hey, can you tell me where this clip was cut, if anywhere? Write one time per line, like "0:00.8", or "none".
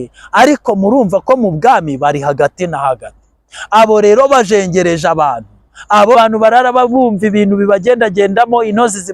0:06.2